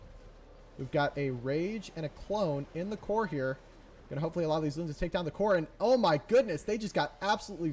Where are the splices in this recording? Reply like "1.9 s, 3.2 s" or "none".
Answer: none